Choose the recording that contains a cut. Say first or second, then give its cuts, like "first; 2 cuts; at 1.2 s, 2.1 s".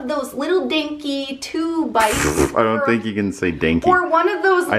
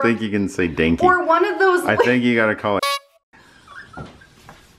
second; 1 cut; at 2.9 s